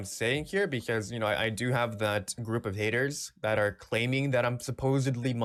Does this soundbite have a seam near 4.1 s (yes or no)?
no